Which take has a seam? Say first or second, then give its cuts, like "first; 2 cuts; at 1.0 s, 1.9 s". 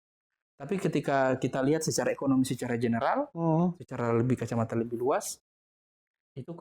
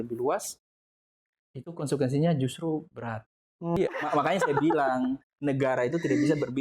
second; 1 cut; at 3.8 s